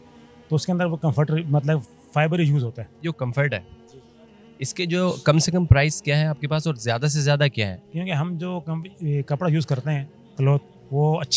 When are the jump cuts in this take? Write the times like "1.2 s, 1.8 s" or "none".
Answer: 2.9 s